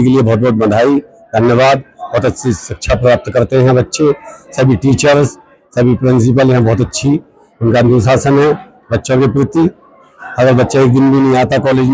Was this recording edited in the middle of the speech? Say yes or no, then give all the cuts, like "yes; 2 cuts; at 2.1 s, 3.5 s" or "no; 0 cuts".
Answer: no; 0 cuts